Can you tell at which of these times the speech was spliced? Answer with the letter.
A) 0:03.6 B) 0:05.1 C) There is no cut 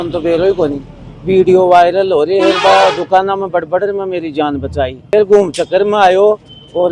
B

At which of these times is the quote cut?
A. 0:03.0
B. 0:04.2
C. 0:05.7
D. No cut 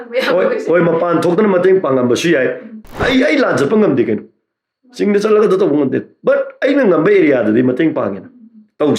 A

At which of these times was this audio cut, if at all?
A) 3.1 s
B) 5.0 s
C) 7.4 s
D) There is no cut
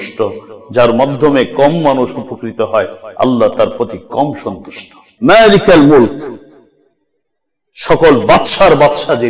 B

